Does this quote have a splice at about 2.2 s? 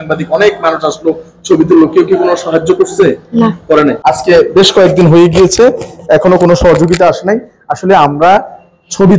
no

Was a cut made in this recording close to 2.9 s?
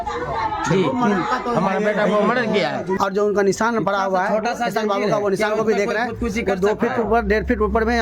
yes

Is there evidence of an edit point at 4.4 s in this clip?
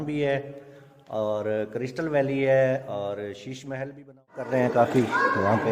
yes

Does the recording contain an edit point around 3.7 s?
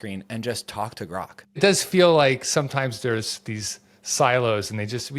no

